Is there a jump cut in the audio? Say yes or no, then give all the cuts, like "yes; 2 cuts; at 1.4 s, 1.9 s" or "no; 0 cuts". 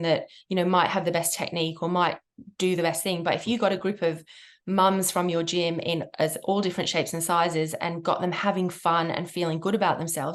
no; 0 cuts